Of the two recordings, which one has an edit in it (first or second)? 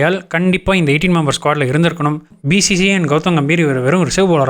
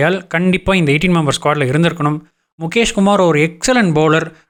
first